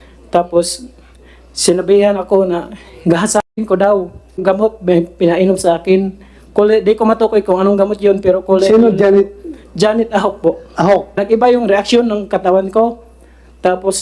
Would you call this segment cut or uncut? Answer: cut